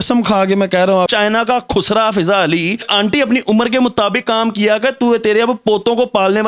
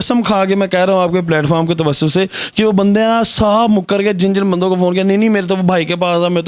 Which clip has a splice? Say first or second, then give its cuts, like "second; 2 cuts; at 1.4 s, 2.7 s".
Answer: first; 2 cuts; at 1.1 s, 2.8 s